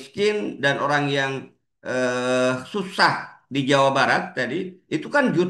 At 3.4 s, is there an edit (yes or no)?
no